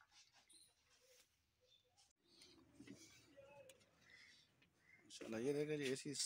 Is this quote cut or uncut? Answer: cut